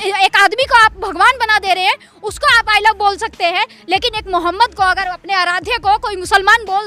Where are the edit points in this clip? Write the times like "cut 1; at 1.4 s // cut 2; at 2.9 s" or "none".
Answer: none